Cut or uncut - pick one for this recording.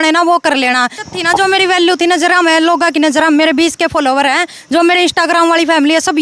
cut